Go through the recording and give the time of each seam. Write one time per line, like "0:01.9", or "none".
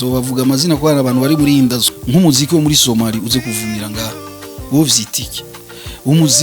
0:01.9